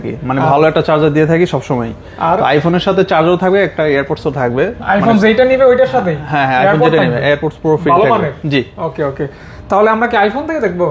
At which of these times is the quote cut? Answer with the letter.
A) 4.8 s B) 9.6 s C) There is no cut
C